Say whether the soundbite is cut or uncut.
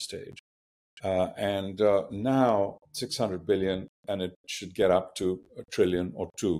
uncut